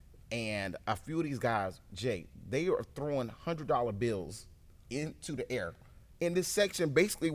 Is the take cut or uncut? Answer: uncut